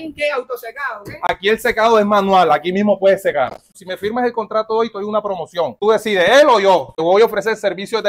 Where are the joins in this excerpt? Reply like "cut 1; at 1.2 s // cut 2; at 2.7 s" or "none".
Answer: cut 1; at 3.7 s

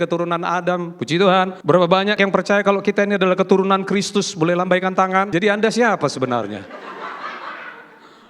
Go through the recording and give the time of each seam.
cut 1; at 2.0 s // cut 2; at 5.3 s

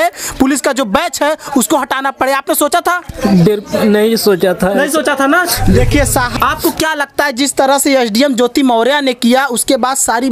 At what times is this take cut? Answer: cut 1; at 6.4 s

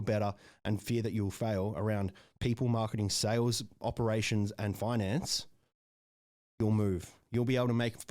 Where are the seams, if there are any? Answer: cut 1; at 3.8 s

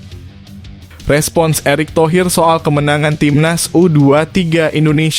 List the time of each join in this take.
cut 1; at 1.0 s

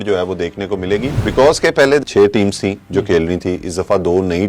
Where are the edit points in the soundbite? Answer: cut 1; at 1.2 s // cut 2; at 2.0 s

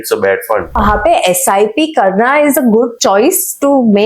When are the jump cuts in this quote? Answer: cut 1; at 0.8 s // cut 2; at 2.9 s

